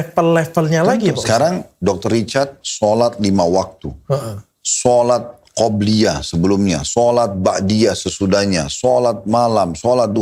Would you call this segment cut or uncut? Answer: uncut